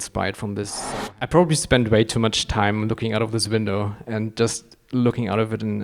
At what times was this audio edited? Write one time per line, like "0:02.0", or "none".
0:00.9